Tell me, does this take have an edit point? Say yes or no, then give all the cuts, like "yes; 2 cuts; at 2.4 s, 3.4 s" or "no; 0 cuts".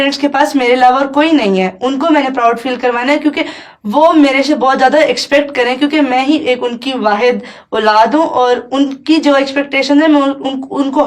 no; 0 cuts